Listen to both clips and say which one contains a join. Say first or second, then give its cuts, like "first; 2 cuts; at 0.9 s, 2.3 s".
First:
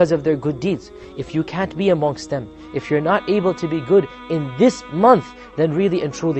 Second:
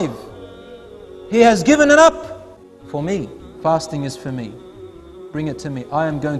second; 1 cut; at 3.4 s